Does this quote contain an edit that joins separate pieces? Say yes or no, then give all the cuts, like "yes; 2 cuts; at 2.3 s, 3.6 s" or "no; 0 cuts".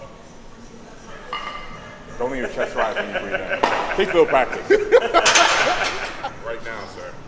yes; 1 cut; at 6.1 s